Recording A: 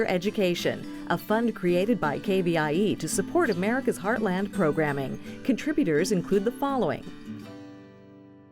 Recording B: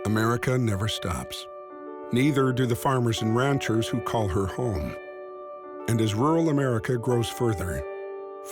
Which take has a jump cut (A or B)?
A